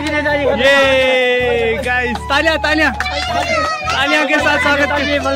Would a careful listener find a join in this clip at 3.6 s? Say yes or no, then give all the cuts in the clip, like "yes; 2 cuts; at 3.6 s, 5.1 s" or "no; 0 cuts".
no; 0 cuts